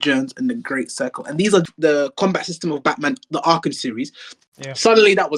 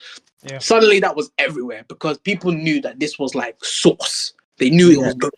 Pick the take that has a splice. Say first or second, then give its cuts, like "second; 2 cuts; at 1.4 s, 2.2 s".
first; 1 cut; at 1.6 s